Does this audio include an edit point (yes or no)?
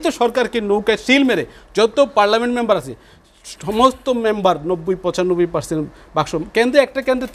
no